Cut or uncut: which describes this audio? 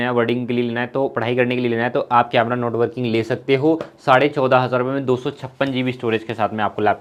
uncut